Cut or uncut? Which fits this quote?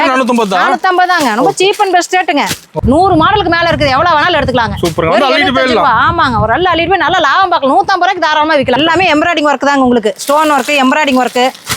cut